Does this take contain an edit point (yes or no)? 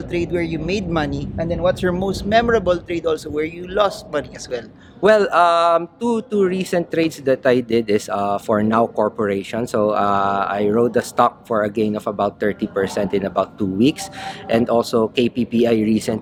no